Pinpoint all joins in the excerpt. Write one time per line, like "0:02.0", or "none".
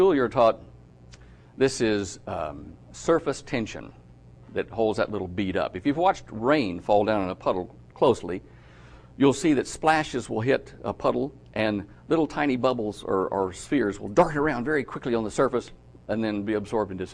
none